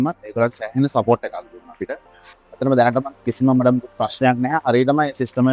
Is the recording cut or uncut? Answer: cut